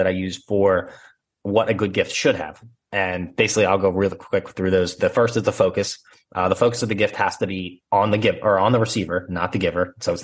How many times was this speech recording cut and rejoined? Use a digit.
0